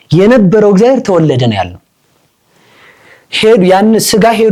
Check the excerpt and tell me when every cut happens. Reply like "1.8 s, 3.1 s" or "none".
none

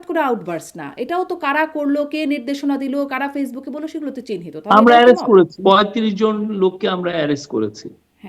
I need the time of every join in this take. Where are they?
5.5 s

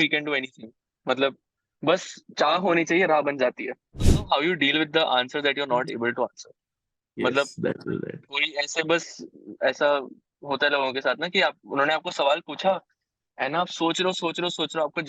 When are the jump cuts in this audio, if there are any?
4.1 s

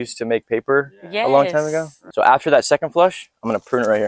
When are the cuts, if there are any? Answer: 2.0 s

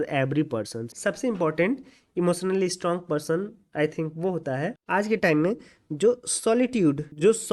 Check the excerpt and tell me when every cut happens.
1.0 s

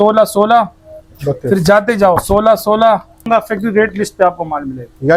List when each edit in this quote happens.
3.2 s

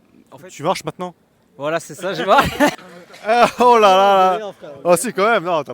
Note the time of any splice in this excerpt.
2.7 s

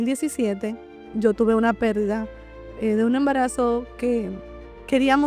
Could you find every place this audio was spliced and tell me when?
none

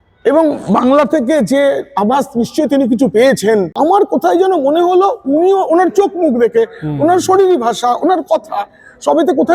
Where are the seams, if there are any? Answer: 3.7 s

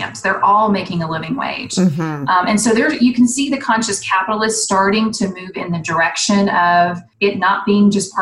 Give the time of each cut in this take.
7.0 s

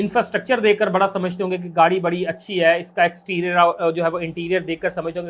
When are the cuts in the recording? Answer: none

